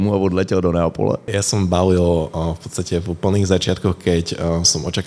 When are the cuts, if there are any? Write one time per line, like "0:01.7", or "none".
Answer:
0:01.3